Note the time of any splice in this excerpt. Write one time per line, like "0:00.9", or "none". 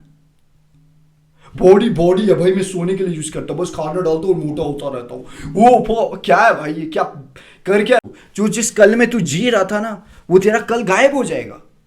0:08.0